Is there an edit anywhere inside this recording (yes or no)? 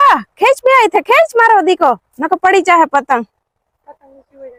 no